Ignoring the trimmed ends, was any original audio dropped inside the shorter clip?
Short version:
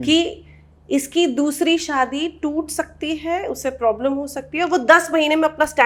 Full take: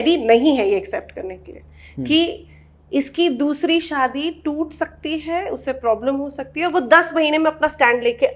no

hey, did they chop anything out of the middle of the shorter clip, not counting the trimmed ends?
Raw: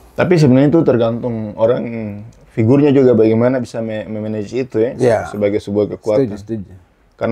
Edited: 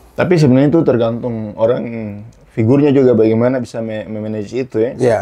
no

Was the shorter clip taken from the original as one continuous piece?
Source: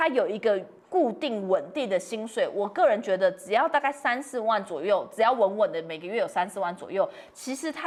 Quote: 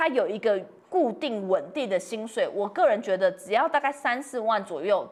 yes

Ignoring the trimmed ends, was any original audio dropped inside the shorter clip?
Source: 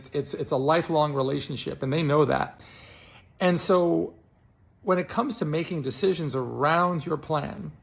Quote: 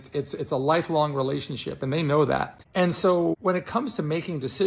yes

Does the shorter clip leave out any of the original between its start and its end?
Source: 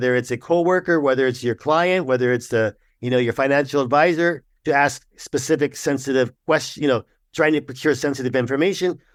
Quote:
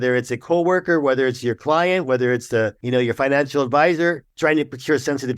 yes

